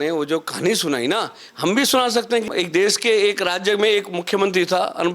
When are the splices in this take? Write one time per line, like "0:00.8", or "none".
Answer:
0:02.5